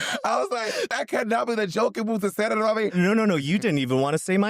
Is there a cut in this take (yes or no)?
yes